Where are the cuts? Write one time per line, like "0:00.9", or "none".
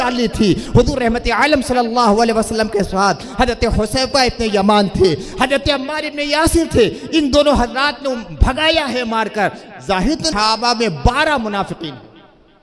0:10.3